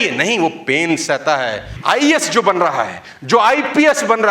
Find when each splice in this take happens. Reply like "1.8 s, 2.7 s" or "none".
1.7 s